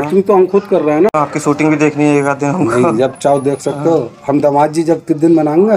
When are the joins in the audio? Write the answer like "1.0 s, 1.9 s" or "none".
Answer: 1.1 s